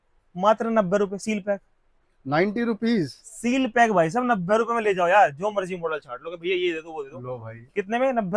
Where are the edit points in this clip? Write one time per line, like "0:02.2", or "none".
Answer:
none